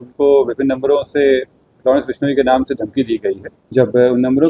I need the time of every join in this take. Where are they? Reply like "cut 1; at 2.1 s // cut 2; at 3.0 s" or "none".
cut 1; at 3.5 s